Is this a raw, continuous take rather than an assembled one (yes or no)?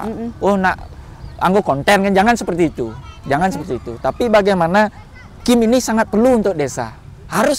yes